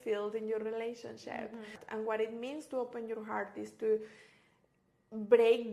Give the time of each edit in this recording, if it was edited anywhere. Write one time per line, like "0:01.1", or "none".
0:01.8